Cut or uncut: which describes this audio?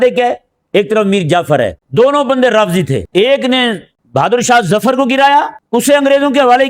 cut